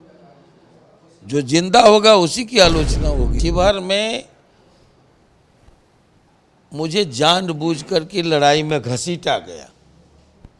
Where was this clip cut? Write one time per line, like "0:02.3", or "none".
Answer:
0:03.3